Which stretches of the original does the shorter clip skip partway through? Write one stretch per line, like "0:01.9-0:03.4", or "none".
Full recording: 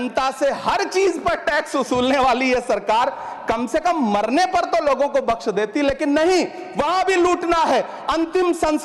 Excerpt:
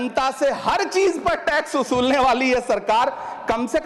none